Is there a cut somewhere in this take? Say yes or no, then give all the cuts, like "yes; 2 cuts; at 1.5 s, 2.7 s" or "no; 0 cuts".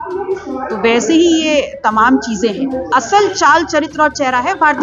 yes; 1 cut; at 2.8 s